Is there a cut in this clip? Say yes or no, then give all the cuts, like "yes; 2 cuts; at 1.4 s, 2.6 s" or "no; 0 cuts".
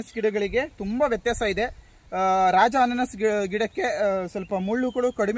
no; 0 cuts